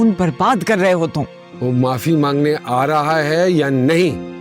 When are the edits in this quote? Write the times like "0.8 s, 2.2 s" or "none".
1.4 s